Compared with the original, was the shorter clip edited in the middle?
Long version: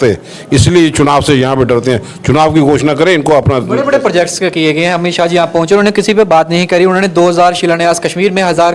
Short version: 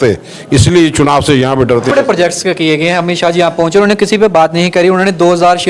yes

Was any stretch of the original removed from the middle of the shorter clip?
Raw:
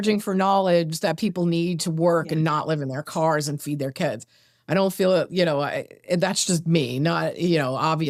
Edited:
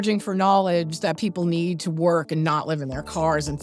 no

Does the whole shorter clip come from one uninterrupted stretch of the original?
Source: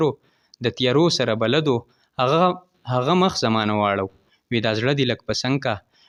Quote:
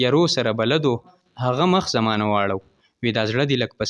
no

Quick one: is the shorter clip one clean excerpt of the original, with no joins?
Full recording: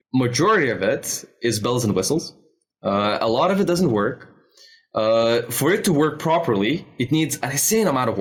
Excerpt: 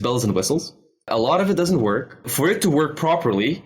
no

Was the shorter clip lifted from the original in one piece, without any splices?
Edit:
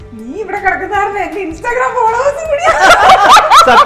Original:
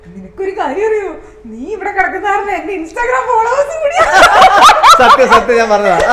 yes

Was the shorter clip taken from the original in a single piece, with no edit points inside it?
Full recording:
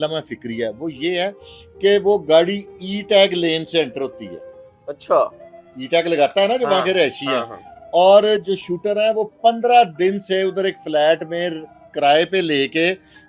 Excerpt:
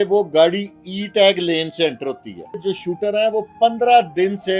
no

